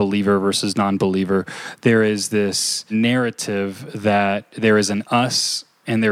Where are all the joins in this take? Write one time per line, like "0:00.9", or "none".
0:02.9
0:04.5